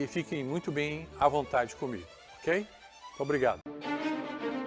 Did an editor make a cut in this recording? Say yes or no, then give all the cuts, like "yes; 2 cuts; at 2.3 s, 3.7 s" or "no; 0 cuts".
yes; 1 cut; at 3.6 s